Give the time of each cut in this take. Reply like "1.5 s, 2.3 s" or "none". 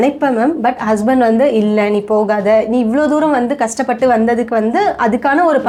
none